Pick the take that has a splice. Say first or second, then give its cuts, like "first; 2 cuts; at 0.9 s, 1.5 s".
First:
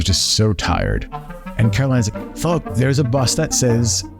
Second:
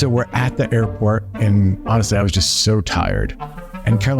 second; 1 cut; at 1.3 s